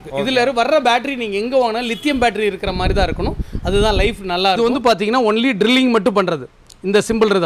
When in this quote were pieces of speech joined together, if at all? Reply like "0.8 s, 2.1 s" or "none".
4.6 s